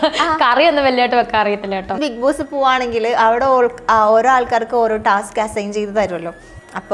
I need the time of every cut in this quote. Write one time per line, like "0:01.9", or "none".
0:01.9